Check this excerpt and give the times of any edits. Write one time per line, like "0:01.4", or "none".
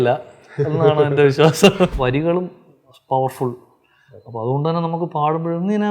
0:01.9